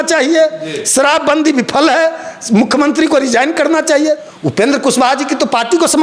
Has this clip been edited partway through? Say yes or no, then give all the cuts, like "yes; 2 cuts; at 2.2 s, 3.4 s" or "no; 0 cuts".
yes; 1 cut; at 4.3 s